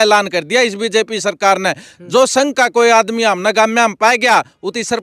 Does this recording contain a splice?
no; 0 cuts

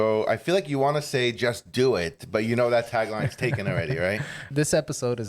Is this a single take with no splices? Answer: no; 1 cut; at 4.4 s

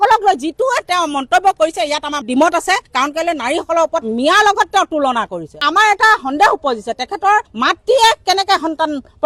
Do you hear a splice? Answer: no; 0 cuts

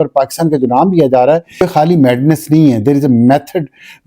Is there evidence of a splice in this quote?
yes; 1 cut; at 1.6 s

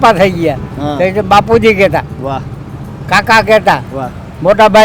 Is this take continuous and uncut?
yes; 0 cuts

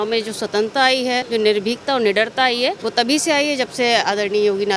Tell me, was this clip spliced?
yes; 2 cuts; at 1.2 s, 2.8 s

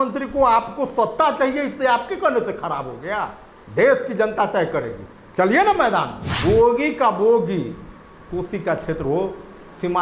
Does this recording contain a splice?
yes; 1 cut; at 6.2 s

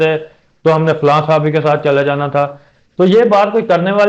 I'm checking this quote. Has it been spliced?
no; 0 cuts

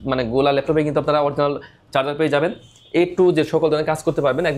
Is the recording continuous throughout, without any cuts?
yes; 0 cuts

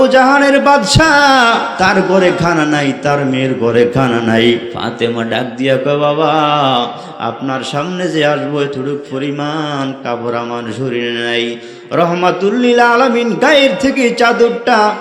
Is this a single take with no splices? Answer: no; 2 cuts; at 1.7 s, 4.8 s

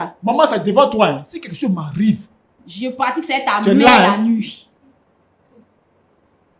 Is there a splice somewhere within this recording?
no; 0 cuts

